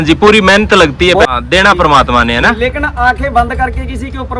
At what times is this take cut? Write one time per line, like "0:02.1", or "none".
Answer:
0:01.3